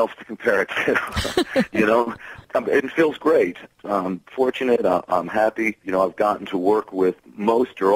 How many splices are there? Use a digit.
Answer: 3